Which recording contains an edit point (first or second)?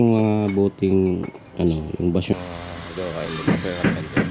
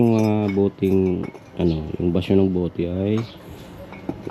first